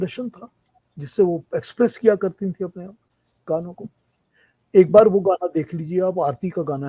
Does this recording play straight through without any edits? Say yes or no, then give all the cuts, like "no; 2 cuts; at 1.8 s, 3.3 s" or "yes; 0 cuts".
yes; 0 cuts